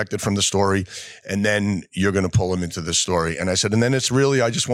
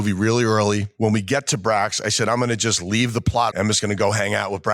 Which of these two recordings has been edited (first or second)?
second